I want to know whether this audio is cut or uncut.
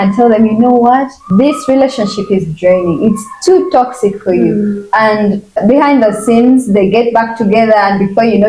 cut